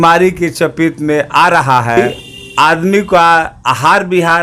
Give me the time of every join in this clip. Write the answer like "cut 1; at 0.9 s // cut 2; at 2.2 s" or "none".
cut 1; at 2.0 s